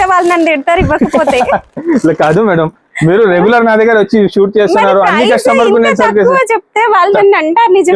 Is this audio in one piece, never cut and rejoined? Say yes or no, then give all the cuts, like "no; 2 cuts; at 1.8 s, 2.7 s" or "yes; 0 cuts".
yes; 0 cuts